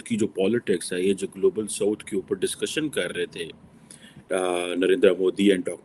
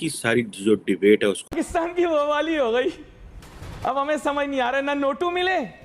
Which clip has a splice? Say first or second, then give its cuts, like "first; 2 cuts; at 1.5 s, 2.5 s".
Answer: second; 1 cut; at 1.5 s